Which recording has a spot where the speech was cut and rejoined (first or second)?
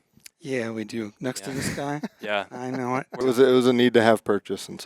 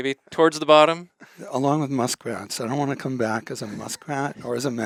first